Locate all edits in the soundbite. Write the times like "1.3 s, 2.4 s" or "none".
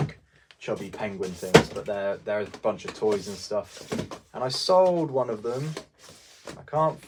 none